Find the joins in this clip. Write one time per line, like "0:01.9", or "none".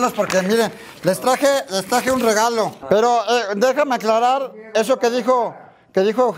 0:02.8